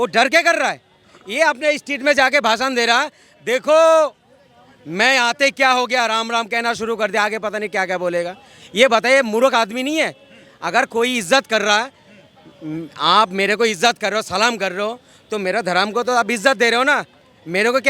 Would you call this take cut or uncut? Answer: uncut